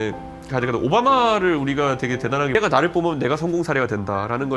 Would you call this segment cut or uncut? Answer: cut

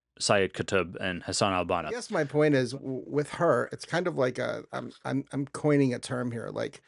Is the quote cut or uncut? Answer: cut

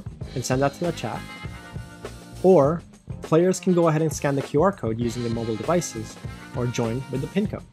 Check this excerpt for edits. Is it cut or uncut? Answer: uncut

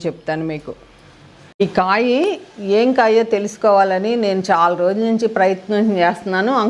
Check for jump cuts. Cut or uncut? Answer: cut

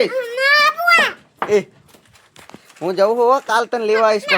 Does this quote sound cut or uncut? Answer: uncut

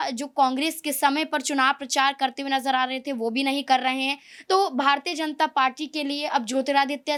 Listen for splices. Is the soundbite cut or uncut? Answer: uncut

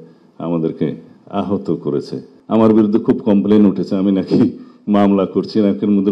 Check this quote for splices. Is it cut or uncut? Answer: cut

